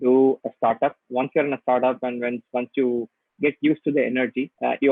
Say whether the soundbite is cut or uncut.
uncut